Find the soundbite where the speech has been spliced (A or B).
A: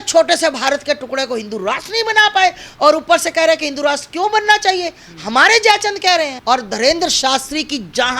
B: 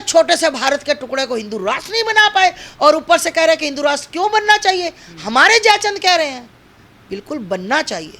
A